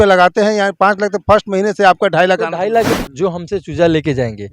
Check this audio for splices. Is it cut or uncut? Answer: cut